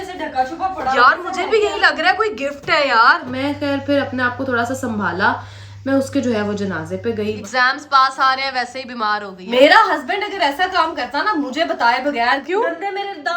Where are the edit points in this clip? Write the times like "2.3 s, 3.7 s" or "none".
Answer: 3.3 s, 7.4 s, 9.4 s, 12.4 s